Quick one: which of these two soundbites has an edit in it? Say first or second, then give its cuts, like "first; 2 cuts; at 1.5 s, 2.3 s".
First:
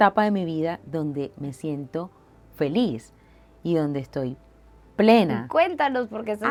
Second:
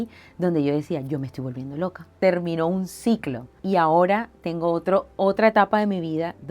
second; 2 cuts; at 2.2 s, 3.6 s